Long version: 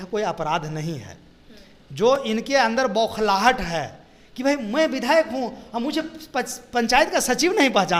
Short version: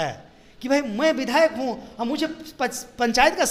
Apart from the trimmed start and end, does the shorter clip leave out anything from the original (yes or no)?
no